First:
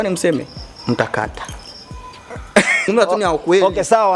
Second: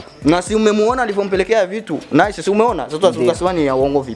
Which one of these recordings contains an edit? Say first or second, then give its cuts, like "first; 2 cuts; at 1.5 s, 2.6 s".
first; 1 cut; at 2.9 s